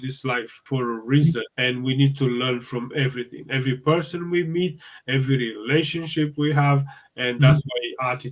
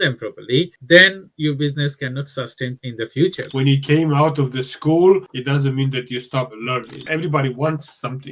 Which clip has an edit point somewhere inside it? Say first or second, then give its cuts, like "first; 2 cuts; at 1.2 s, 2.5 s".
second; 2 cuts; at 3.4 s, 7.0 s